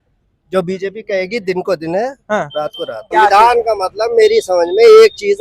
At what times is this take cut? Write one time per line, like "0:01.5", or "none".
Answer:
0:03.0

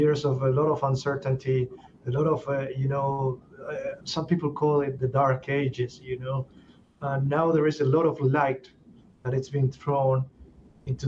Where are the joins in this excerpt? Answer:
none

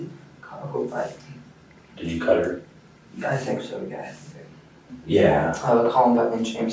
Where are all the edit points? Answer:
0:04.8

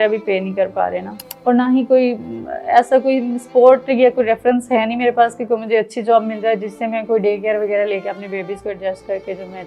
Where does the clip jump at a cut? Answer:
0:01.3

